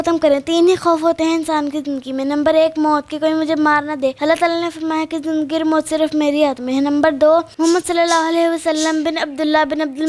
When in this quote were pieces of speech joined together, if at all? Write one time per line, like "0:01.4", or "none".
0:07.5